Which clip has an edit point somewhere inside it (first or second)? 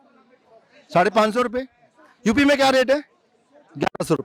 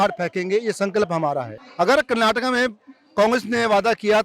second